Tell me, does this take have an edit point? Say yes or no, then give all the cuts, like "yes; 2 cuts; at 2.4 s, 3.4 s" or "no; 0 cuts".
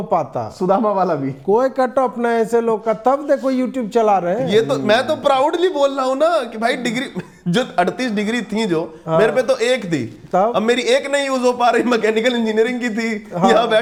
no; 0 cuts